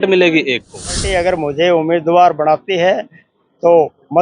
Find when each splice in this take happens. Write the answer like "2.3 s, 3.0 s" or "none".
1.0 s

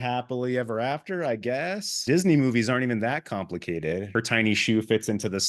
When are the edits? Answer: 2.0 s, 4.1 s

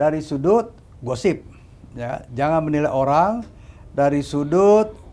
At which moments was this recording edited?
none

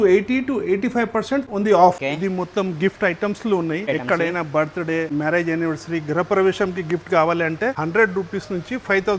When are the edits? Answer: 1.5 s, 2.0 s, 3.8 s, 5.1 s, 7.8 s

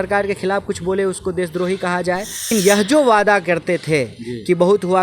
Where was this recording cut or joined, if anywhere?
2.5 s

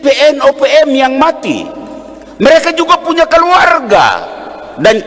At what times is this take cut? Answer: none

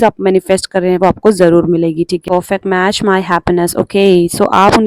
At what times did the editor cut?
2.2 s

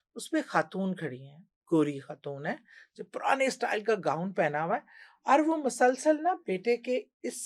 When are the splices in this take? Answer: none

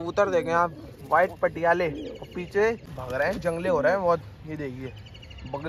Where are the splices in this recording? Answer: 2.9 s

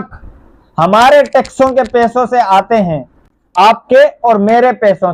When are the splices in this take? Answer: none

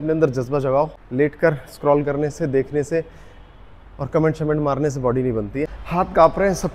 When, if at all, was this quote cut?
1.0 s, 5.8 s

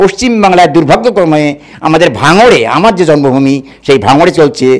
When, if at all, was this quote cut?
none

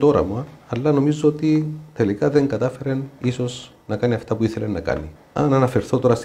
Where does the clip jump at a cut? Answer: 5.1 s

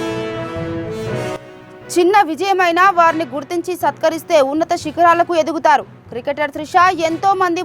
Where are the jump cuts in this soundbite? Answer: none

